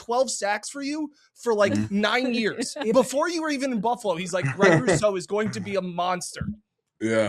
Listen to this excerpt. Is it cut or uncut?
uncut